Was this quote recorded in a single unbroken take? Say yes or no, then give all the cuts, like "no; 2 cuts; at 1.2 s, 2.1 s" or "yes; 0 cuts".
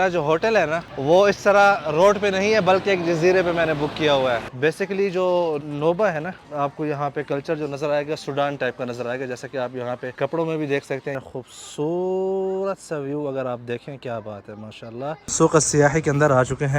no; 7 cuts; at 0.9 s, 4.5 s, 5.6 s, 6.4 s, 10.1 s, 11.2 s, 15.3 s